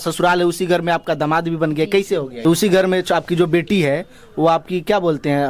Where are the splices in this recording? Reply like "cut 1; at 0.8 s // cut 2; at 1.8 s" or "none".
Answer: cut 1; at 2.3 s